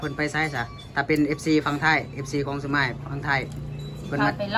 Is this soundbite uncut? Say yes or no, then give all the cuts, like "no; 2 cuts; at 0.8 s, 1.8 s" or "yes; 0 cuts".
yes; 0 cuts